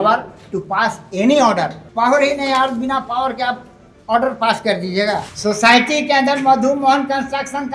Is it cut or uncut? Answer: cut